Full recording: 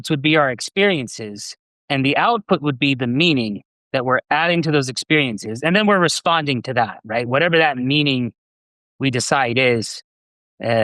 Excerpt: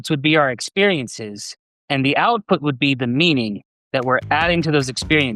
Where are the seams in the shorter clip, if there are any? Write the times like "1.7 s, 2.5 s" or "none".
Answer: none